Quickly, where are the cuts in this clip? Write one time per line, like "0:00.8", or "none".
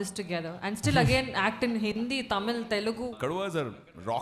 0:03.2